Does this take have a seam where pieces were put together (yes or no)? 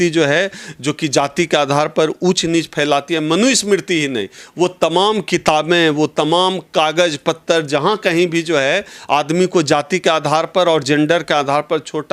no